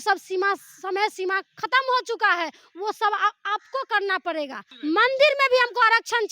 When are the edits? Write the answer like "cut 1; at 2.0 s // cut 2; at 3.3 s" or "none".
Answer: cut 1; at 4.6 s

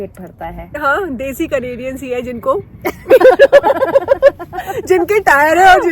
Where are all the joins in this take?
none

